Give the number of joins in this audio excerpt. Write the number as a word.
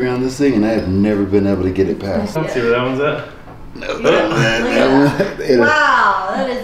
one